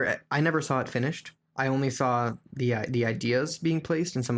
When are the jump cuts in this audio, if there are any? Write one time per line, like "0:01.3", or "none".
none